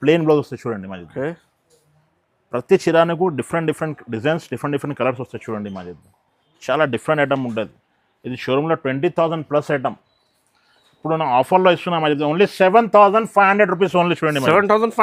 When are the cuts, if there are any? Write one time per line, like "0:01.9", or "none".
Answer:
none